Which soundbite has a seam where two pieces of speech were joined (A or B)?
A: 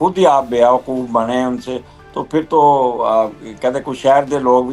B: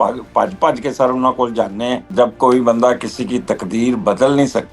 B